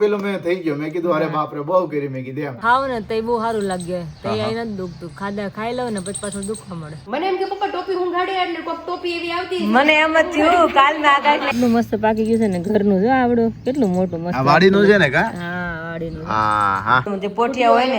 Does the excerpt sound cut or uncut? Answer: cut